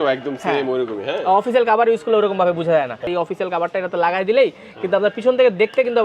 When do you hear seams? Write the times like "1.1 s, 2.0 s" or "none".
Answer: 3.0 s